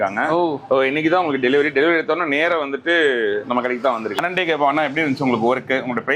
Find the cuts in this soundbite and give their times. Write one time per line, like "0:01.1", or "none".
0:04.2